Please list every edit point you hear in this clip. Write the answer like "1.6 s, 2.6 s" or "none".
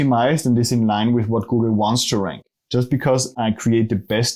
none